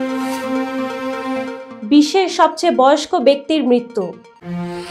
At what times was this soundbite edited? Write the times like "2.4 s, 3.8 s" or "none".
none